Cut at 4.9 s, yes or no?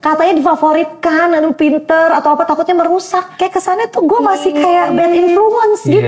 yes